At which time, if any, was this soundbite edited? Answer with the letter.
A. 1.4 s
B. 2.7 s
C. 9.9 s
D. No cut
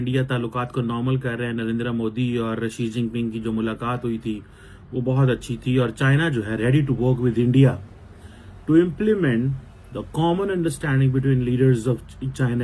D